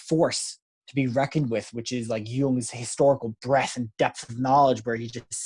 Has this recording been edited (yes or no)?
no